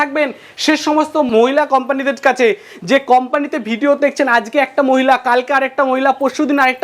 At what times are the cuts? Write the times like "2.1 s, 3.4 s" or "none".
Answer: 1.3 s